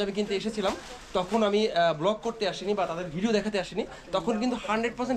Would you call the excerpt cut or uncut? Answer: uncut